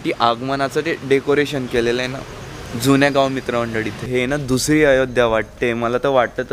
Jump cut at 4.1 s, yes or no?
yes